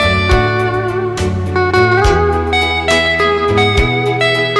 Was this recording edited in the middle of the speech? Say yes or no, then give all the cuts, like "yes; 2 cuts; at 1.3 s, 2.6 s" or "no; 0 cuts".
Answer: yes; 1 cut; at 0.9 s